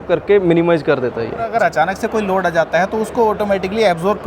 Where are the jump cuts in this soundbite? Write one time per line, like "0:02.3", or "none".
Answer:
0:01.5